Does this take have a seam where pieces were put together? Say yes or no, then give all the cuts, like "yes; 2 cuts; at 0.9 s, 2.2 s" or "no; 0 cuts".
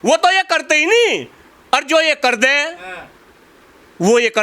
no; 0 cuts